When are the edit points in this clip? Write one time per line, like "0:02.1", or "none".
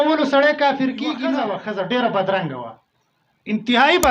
0:01.5